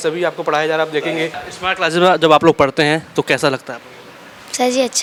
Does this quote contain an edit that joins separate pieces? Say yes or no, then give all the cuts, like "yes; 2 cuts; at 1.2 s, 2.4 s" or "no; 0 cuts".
no; 0 cuts